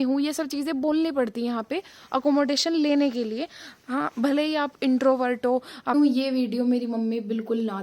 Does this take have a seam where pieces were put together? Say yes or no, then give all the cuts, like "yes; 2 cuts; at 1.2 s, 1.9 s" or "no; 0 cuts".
yes; 1 cut; at 5.9 s